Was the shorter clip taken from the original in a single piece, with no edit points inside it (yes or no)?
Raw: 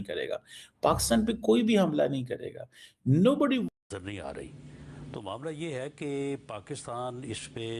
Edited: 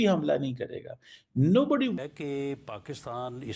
no